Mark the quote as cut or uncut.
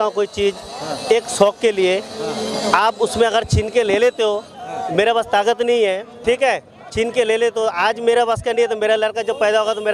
uncut